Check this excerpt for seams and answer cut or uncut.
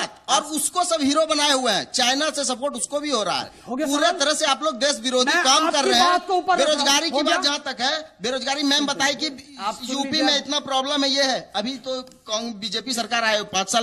uncut